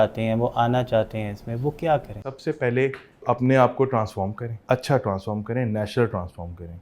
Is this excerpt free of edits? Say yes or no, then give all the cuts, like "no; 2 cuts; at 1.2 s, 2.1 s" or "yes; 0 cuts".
no; 3 cuts; at 2.3 s, 3.2 s, 4.5 s